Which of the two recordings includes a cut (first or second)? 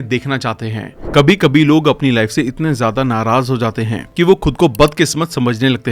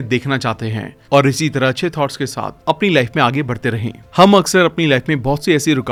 first